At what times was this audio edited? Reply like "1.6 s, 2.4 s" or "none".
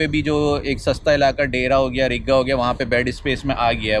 none

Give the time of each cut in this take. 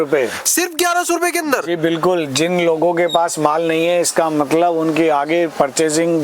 none

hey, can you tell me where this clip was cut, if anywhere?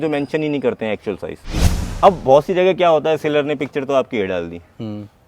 1.4 s

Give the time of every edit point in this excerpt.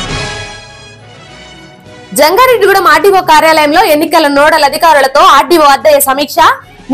0.9 s

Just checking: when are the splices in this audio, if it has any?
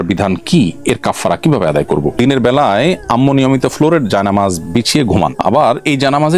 2.1 s

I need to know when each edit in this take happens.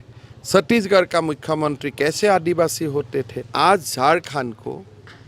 3.4 s

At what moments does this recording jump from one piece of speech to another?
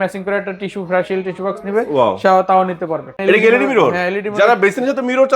3.2 s

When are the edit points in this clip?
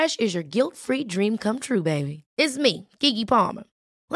none

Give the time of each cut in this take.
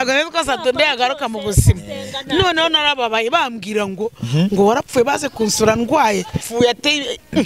6.4 s

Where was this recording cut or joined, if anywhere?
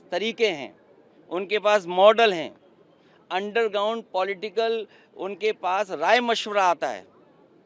none

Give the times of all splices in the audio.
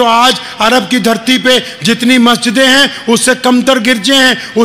none

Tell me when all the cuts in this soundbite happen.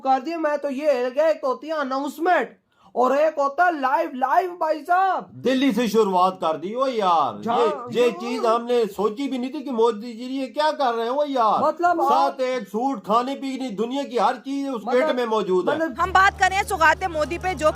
16.0 s

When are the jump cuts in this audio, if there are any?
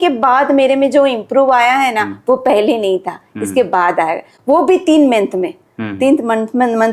none

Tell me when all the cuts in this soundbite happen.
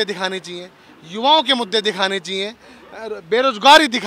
none

